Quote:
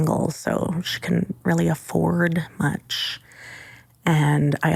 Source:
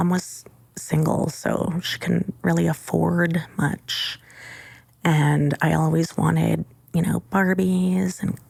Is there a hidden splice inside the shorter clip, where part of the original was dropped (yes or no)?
no